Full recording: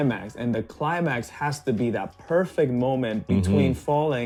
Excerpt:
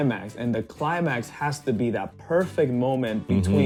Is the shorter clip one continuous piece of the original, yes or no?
yes